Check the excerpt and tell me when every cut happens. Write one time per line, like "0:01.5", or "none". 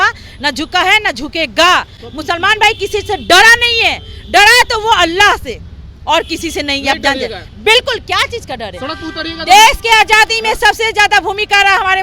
none